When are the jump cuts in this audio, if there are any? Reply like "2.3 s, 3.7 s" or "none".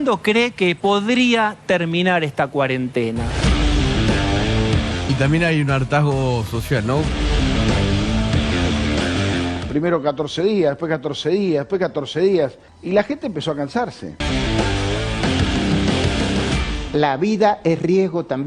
5.0 s, 7.1 s, 9.6 s, 14.1 s, 16.6 s